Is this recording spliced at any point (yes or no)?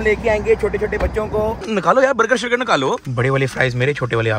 yes